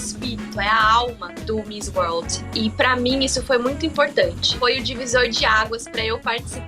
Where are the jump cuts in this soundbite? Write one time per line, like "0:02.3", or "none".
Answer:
0:01.3
0:04.4

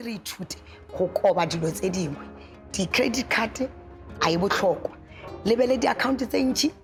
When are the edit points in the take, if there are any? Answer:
none

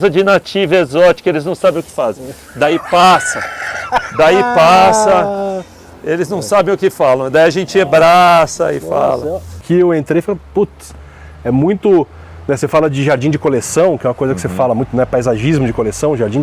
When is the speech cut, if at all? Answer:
0:09.5

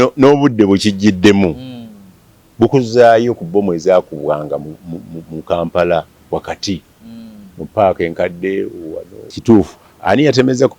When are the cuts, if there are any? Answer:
0:09.4

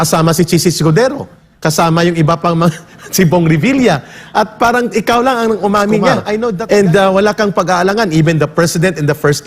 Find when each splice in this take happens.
0:06.5

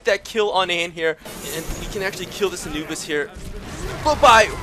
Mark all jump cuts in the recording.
0:01.3

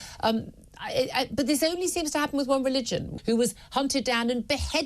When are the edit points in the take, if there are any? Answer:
0:03.1

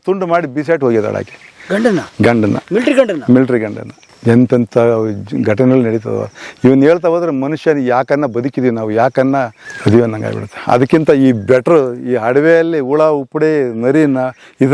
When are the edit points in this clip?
0:09.6

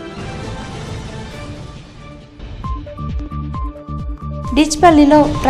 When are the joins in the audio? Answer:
0:02.4
0:04.3

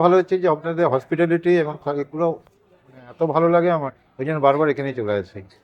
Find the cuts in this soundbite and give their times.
none

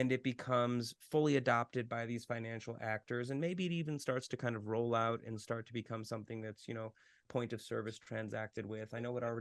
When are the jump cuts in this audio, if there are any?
0:07.2

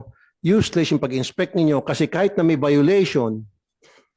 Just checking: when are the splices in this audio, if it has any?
none

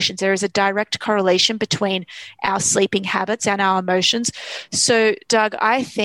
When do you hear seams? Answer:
none

